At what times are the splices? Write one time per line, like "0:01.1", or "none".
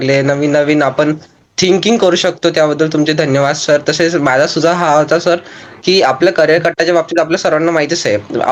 none